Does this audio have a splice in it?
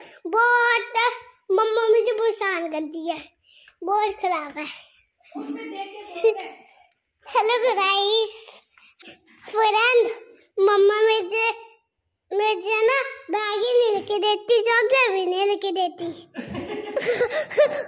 yes; 1 cut; at 9.0 s

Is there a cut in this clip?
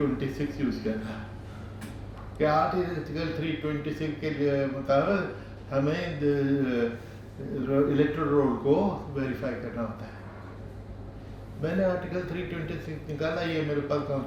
no; 0 cuts

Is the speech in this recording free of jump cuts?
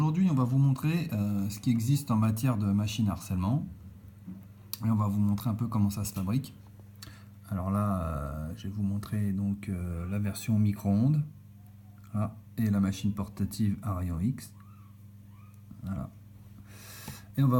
yes; 0 cuts

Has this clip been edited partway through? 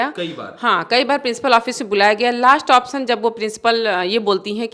no; 0 cuts

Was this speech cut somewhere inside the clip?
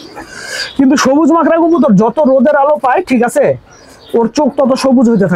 no; 0 cuts

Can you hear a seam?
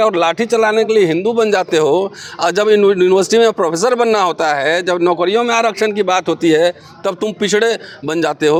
no; 0 cuts

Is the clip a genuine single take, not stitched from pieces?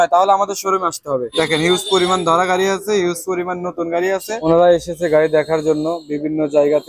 no; 2 cuts; at 1.3 s, 4.3 s

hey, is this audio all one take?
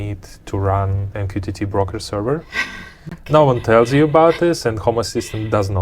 yes; 0 cuts

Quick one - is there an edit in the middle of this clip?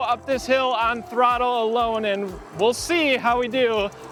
no; 0 cuts

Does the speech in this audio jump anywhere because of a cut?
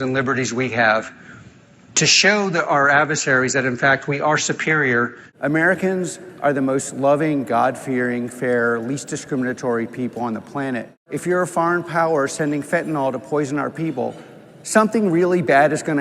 yes; 1 cut; at 5.2 s

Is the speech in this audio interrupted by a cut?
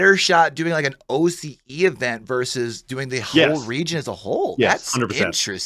no; 0 cuts

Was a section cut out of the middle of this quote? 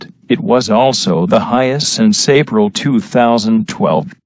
yes; 1 cut; at 3.3 s

